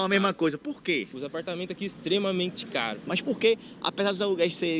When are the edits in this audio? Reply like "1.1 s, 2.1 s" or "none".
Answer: 1.2 s, 3.0 s